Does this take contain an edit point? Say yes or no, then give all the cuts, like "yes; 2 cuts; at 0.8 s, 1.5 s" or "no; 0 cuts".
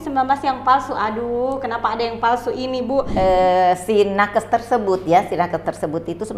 yes; 1 cut; at 3.1 s